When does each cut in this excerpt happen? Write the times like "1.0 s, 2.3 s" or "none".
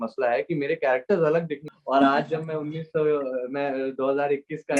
1.7 s